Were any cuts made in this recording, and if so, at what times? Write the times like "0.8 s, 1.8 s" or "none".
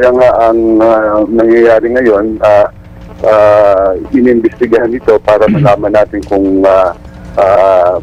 none